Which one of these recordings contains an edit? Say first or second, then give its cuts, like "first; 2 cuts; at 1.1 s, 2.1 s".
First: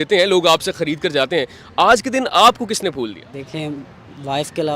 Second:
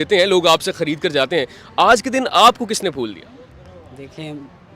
first; 1 cut; at 3.2 s